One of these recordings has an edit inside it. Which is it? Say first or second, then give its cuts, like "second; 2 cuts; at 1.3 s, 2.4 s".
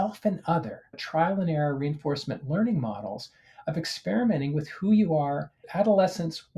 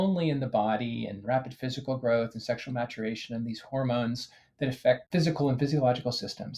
first; 2 cuts; at 1.0 s, 5.6 s